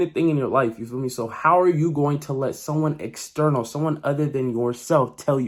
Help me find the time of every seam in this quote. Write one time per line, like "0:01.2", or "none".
none